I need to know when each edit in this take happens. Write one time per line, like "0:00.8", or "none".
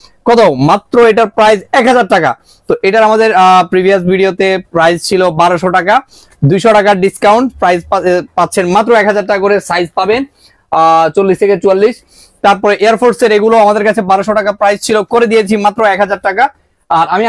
none